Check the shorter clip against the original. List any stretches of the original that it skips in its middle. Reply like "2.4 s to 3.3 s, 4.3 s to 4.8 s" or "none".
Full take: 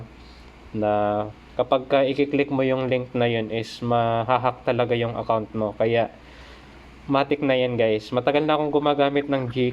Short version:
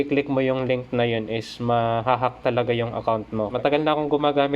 5.7 s to 8.1 s